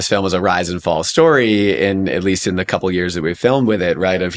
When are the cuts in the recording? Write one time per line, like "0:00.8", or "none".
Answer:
none